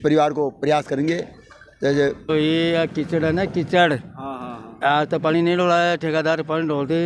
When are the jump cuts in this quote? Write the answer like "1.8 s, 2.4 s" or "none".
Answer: 2.3 s